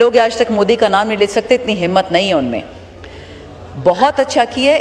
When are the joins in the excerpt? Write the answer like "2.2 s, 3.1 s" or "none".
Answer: none